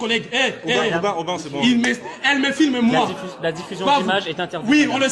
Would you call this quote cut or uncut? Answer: uncut